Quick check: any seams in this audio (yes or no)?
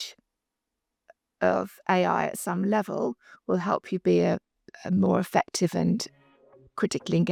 no